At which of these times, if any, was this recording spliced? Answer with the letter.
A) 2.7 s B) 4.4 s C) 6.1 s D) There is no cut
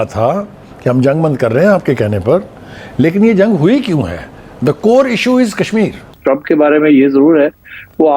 C